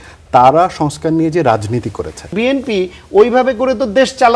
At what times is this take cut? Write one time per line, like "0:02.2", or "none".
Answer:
0:02.3